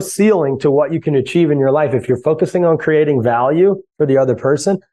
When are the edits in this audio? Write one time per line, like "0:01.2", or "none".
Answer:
none